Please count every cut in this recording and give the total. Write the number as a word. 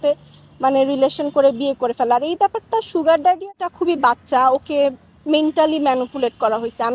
one